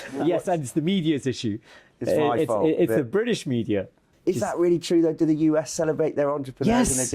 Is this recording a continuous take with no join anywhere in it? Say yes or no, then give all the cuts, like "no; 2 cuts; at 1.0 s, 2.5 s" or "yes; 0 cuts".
no; 1 cut; at 4.1 s